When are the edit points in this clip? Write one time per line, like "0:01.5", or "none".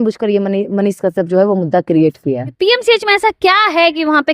0:02.5